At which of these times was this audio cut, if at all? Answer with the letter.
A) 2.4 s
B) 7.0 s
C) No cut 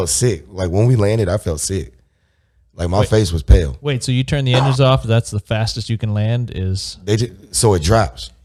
C